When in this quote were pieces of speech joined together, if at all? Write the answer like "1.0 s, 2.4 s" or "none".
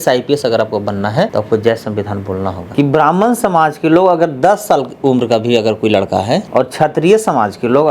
1.3 s, 2.6 s, 6.5 s